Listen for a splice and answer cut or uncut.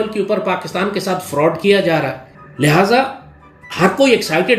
uncut